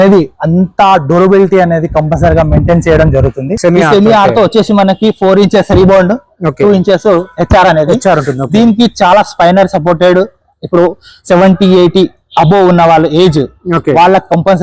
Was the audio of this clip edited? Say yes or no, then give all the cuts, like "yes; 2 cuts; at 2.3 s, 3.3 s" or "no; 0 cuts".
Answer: yes; 1 cut; at 3.5 s